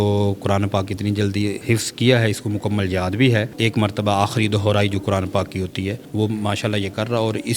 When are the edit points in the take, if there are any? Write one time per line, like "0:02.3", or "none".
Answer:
0:01.6
0:03.5
0:06.0